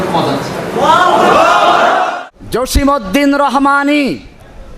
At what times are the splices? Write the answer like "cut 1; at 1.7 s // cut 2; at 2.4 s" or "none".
cut 1; at 2.1 s